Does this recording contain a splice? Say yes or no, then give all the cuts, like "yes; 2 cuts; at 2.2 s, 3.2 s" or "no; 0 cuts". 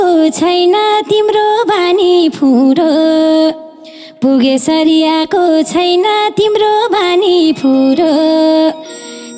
no; 0 cuts